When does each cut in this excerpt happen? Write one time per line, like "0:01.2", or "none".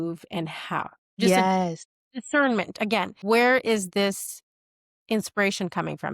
0:01.2
0:03.1